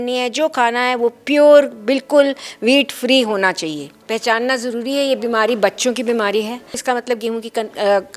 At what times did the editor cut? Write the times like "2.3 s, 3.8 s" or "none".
4.0 s, 6.7 s